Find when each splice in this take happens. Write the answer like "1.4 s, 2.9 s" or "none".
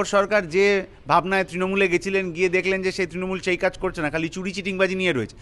none